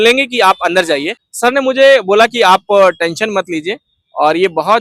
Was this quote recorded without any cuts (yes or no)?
no